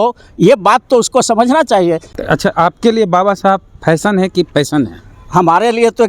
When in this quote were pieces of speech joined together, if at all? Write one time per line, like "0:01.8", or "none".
0:02.1